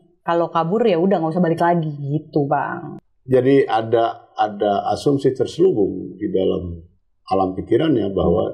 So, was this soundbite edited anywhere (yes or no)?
yes